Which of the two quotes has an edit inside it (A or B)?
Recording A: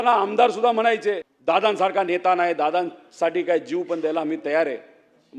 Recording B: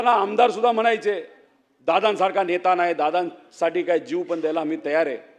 A